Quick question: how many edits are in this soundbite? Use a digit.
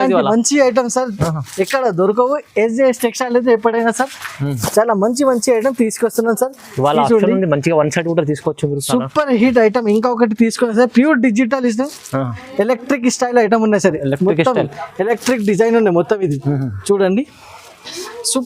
0